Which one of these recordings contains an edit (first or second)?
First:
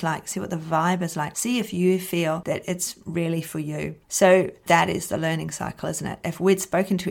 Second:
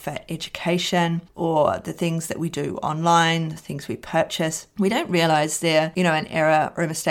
first